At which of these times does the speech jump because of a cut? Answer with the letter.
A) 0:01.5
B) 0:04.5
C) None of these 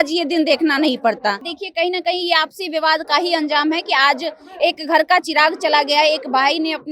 A